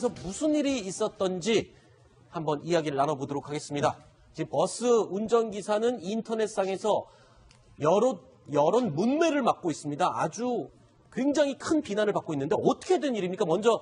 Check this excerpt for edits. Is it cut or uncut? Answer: cut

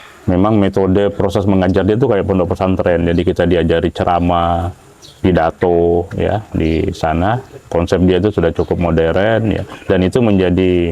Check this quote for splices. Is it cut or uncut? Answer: uncut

